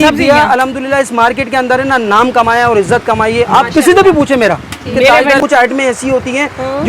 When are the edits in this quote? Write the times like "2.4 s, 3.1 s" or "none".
5.4 s